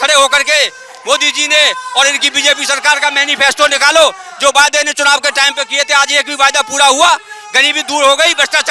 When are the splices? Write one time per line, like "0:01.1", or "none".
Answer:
none